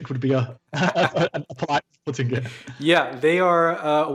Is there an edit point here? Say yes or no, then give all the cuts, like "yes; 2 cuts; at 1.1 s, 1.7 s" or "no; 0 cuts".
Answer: no; 0 cuts